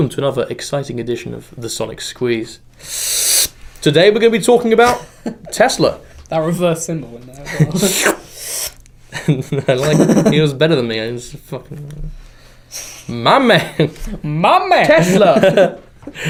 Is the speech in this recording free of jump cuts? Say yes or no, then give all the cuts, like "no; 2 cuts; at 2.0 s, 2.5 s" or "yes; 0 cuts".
yes; 0 cuts